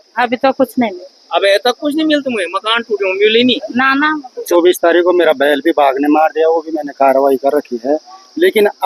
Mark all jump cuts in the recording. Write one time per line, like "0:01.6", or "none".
0:04.4